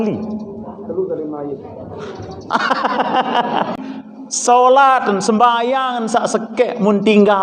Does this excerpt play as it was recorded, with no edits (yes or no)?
no